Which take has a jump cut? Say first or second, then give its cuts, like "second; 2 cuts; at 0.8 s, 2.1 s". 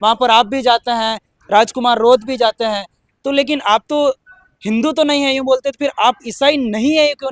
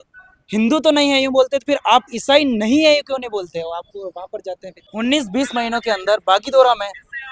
second; 1 cut; at 4.8 s